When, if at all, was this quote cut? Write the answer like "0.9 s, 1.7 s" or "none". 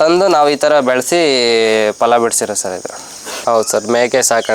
3.4 s